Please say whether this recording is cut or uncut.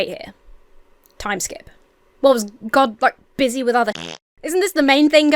uncut